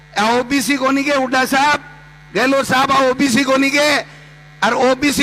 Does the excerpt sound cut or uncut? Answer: uncut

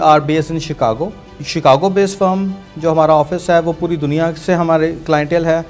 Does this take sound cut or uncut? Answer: cut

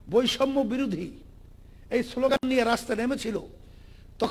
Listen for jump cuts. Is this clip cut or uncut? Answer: uncut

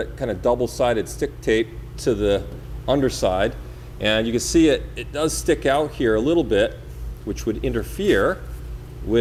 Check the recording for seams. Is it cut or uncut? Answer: uncut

